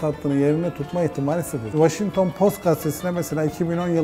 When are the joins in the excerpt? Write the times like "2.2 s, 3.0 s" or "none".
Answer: 1.7 s